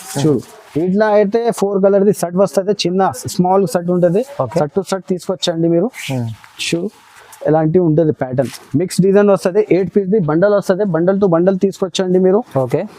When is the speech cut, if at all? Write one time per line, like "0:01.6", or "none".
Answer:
0:08.6